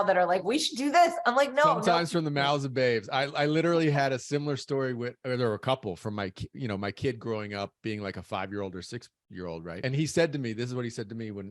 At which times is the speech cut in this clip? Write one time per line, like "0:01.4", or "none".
0:09.8

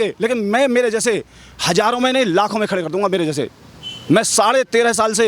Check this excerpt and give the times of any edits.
none

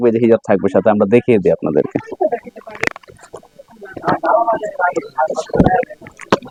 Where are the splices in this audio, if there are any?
none

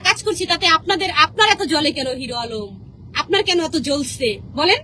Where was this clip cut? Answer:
none

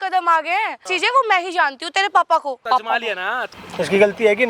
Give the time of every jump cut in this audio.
0:00.9
0:03.1

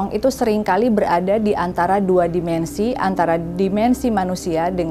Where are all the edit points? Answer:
none

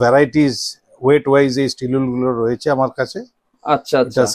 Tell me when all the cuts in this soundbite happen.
none

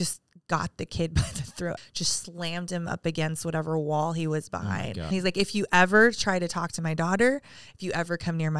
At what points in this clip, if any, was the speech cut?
0:01.8
0:05.1

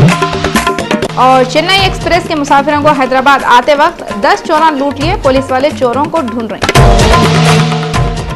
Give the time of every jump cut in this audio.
0:01.0

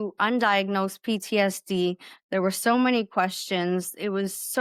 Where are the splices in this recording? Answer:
none

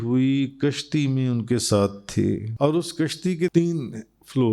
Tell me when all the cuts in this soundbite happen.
0:02.5
0:03.5

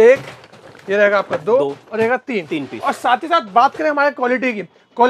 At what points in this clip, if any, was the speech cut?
none

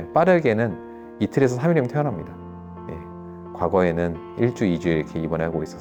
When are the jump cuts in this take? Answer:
none

